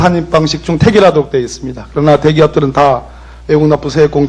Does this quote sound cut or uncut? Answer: uncut